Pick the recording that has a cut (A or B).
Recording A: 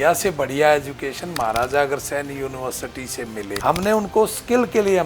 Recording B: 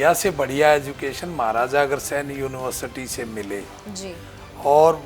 A